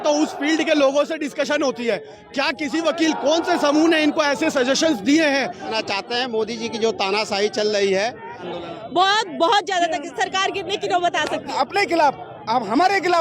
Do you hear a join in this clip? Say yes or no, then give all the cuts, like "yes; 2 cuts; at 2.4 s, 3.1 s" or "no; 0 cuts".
yes; 3 cuts; at 5.7 s, 8.5 s, 11.5 s